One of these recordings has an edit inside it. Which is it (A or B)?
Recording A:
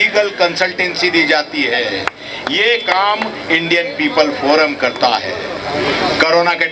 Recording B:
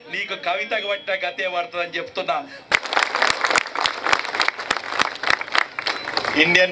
B